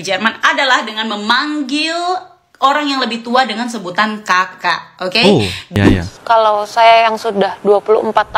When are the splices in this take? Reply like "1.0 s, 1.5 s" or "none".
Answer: 5.7 s